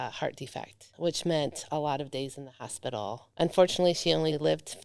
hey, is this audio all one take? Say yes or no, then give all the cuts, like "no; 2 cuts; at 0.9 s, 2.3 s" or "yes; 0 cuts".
no; 1 cut; at 3.2 s